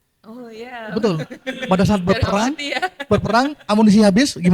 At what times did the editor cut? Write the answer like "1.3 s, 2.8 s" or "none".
none